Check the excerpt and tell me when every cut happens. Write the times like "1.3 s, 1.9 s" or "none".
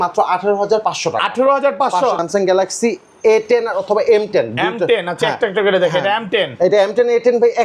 2.2 s

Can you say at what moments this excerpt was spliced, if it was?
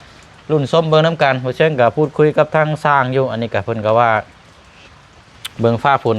none

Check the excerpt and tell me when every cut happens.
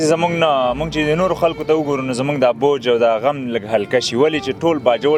none

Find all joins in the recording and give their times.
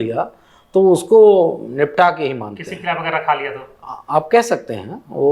none

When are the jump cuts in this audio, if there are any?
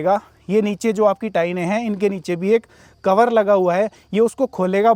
none

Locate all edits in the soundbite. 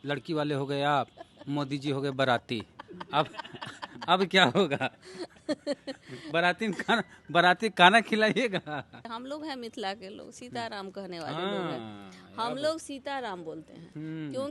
9.1 s

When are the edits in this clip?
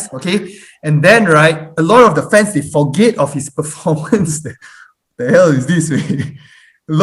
none

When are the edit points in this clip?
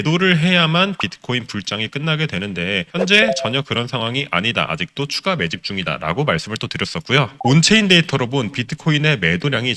none

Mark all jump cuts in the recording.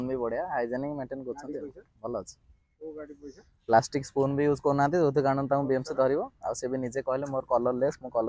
none

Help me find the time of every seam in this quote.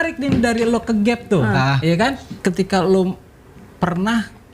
2.3 s

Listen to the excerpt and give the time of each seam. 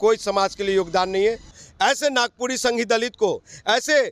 1.5 s

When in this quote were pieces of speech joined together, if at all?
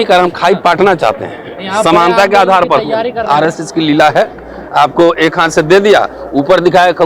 3.2 s

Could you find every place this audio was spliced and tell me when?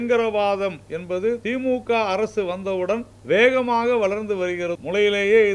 1.4 s, 3.1 s, 4.8 s

